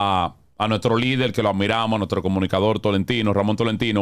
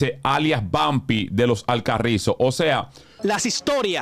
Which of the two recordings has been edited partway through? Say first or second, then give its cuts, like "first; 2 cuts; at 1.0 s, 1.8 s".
second; 1 cut; at 3.0 s